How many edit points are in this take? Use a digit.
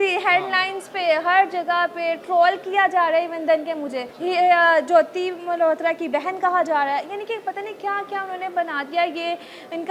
0